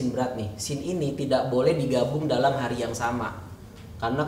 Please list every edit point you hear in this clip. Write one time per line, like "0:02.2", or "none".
none

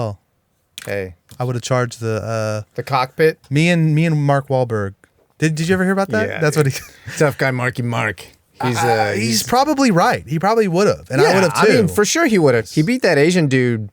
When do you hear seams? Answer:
0:07.1
0:12.6

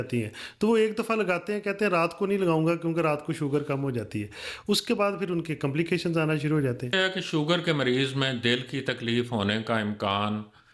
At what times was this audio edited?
0:06.9

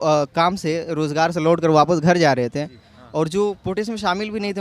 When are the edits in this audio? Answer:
none

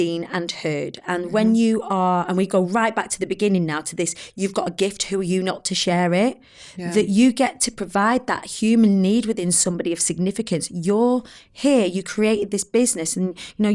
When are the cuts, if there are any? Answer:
none

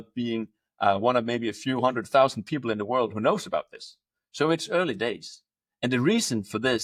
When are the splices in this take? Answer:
none

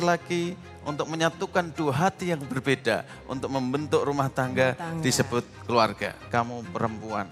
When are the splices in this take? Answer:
0:06.1

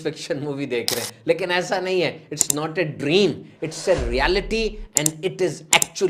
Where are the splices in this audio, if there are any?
none

